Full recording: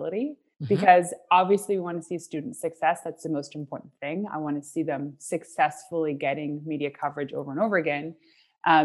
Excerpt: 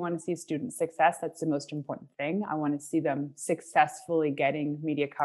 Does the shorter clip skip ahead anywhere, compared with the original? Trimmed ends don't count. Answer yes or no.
no